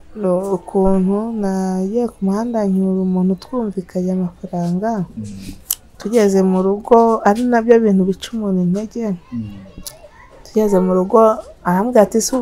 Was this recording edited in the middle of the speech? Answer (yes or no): no